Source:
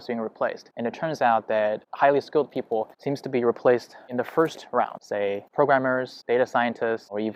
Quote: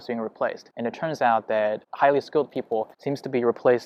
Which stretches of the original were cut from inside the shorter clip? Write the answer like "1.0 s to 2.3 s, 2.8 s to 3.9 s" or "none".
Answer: none